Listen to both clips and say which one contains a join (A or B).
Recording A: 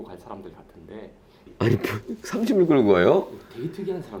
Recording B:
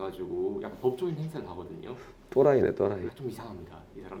A